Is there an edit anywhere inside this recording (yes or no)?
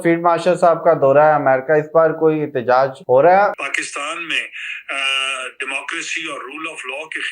yes